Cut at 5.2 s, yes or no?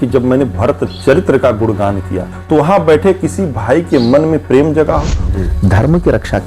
yes